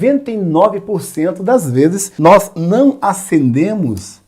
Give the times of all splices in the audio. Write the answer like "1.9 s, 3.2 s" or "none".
2.1 s